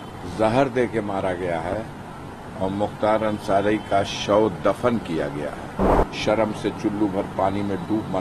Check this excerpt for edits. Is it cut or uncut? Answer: cut